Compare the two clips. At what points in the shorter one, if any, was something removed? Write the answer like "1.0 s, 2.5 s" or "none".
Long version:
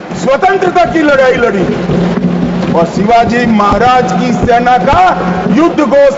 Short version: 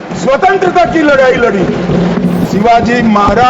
2.5 s